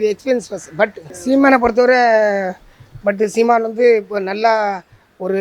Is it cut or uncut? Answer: cut